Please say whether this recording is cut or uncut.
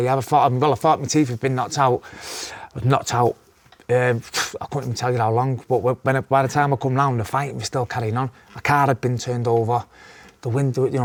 uncut